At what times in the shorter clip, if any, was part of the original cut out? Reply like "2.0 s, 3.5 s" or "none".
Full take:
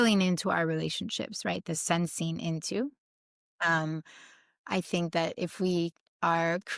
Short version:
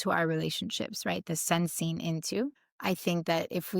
2.7 s